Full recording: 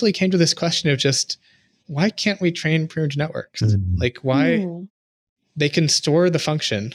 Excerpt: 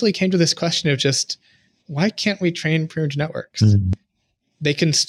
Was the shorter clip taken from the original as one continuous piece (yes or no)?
no